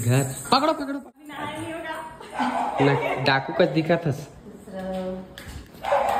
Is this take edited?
yes; 1 cut; at 0.9 s

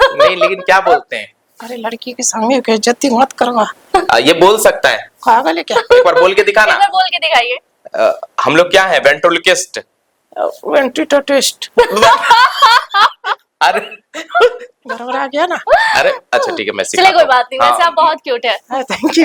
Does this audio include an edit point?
no; 0 cuts

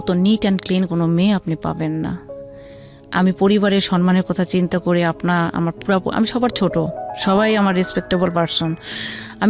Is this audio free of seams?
yes; 0 cuts

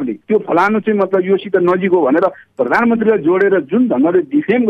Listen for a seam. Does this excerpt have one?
no; 0 cuts

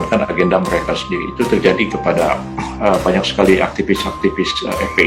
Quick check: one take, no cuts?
yes; 0 cuts

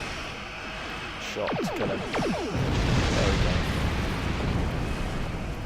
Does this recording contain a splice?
no; 0 cuts

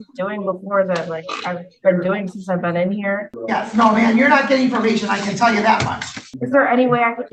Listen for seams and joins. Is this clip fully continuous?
no; 2 cuts; at 3.3 s, 6.3 s

